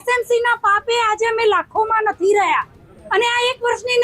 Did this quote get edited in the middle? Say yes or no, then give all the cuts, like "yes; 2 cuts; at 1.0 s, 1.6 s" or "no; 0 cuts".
no; 0 cuts